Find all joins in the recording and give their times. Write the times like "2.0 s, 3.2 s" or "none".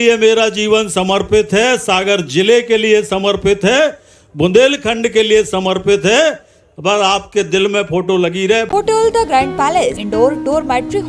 8.7 s, 10.0 s